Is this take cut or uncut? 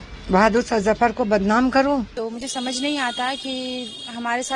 cut